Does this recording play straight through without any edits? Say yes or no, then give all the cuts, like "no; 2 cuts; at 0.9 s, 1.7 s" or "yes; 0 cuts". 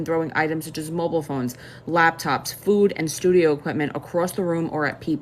no; 1 cut; at 4.3 s